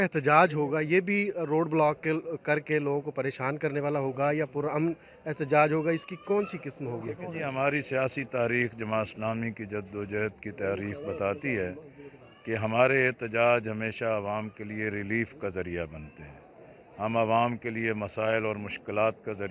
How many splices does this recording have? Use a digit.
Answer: 0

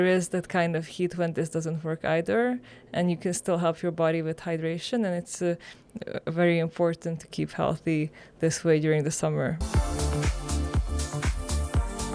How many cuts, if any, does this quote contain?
1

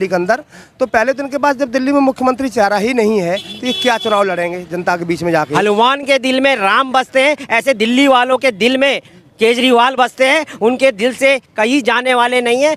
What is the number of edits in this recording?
1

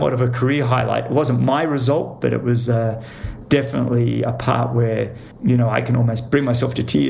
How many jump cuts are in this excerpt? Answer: 1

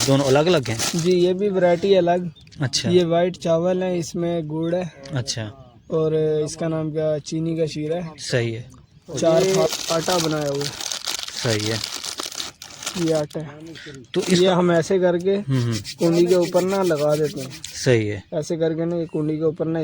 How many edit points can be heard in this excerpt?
1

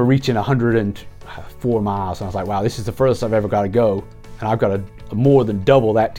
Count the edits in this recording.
0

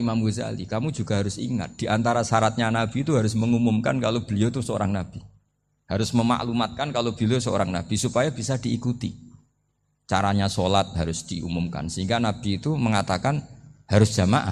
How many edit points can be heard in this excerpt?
0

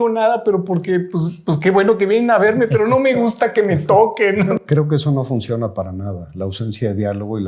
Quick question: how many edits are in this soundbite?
1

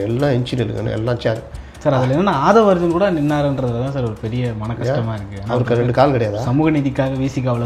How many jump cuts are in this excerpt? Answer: 0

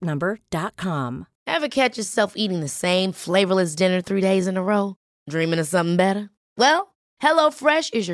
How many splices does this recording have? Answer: 1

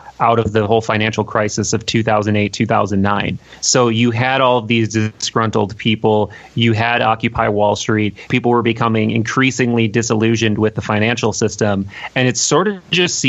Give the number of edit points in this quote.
1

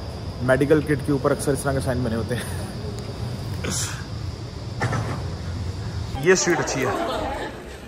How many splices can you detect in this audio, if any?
1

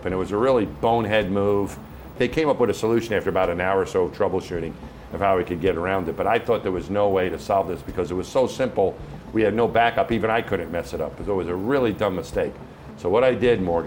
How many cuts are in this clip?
1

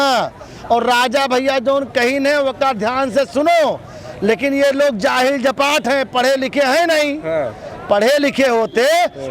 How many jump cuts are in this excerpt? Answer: 0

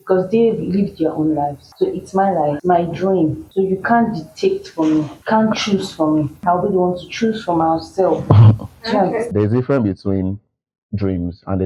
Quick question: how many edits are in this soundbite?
6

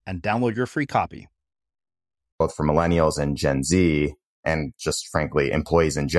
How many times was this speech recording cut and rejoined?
2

